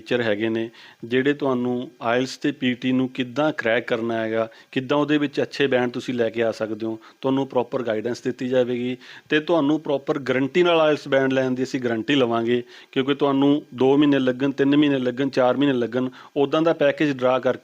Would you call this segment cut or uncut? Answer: uncut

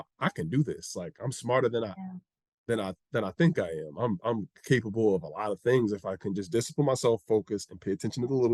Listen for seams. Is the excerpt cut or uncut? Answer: uncut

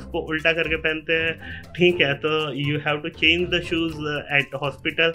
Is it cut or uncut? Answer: uncut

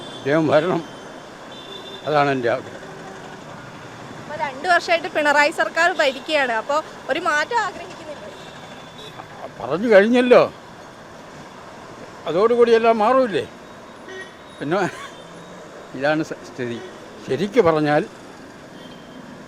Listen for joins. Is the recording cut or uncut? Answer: uncut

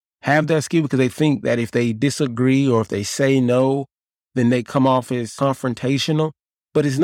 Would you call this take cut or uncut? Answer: cut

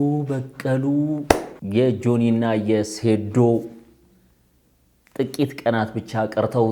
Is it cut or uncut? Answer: cut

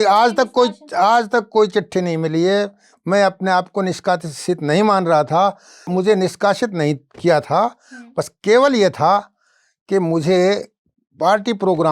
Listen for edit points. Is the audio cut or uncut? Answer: cut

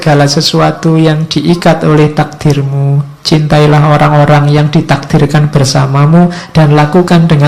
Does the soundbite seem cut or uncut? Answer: uncut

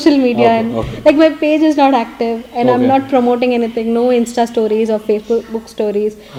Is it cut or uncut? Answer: uncut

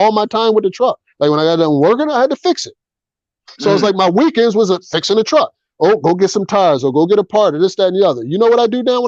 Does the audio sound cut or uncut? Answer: uncut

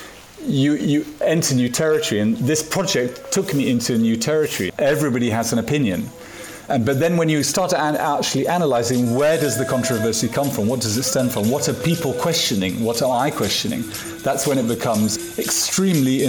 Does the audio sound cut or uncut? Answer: cut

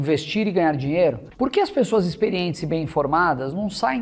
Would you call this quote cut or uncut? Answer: cut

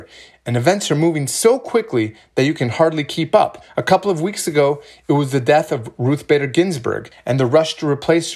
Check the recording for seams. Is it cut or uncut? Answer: cut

